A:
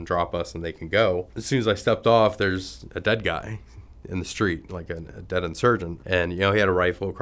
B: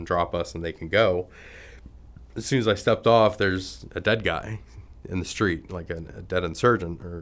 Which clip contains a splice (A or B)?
A